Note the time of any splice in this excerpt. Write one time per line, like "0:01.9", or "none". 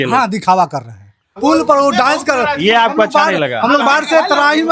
0:01.3